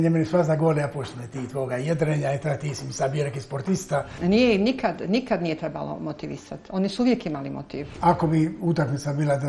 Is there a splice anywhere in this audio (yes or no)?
yes